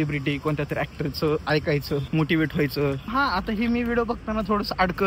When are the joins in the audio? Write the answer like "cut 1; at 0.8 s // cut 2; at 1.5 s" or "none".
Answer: cut 1; at 2.1 s // cut 2; at 3.1 s